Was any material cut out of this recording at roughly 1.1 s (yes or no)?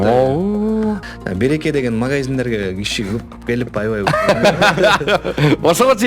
yes